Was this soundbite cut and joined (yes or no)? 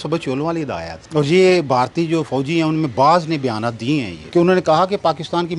yes